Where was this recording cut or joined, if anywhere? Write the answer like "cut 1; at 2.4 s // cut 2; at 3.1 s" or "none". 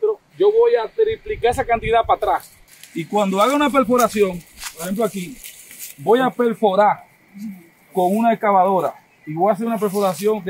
cut 1; at 2.6 s